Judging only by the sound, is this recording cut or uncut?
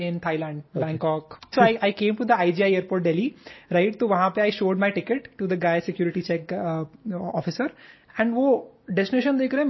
cut